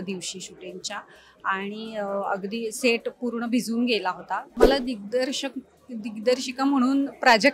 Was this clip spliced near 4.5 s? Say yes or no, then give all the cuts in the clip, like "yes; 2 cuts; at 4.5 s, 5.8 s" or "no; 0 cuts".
yes; 1 cut; at 4.5 s